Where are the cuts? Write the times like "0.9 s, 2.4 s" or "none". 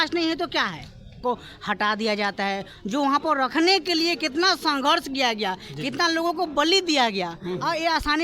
1.2 s